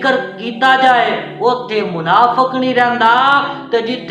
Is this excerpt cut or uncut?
uncut